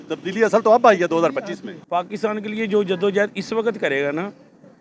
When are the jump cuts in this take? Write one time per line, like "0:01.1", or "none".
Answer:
0:01.9